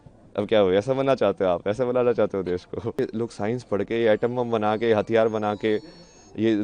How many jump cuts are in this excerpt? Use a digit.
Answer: 1